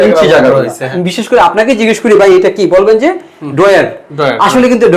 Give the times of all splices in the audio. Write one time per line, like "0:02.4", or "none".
0:00.9